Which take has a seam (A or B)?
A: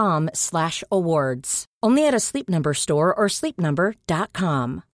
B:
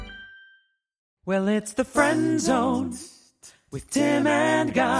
B